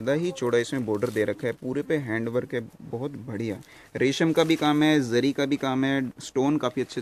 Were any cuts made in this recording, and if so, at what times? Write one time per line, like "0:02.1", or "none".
none